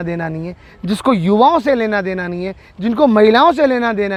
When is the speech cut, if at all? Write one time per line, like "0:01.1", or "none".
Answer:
none